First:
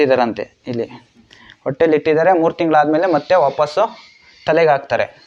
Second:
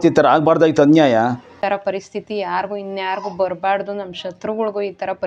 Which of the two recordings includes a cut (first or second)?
second